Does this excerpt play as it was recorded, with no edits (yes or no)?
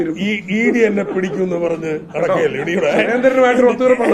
yes